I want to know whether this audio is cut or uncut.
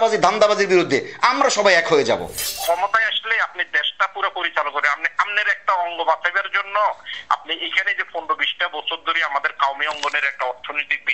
cut